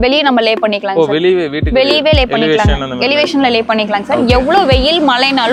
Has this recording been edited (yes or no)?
no